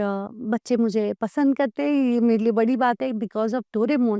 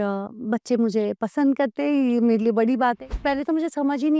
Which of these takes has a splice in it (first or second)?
second